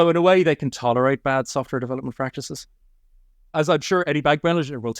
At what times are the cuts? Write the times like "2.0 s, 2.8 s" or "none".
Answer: 3.2 s